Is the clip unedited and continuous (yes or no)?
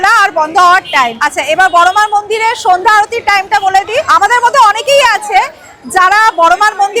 no